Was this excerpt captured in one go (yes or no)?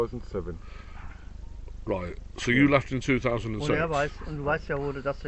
yes